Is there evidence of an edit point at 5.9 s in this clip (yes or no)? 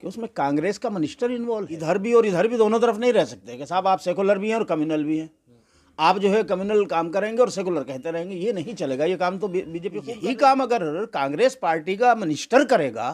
no